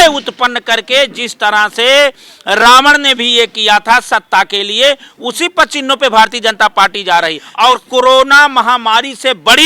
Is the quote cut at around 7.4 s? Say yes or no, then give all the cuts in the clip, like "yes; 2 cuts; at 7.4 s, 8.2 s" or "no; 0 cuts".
yes; 1 cut; at 7.4 s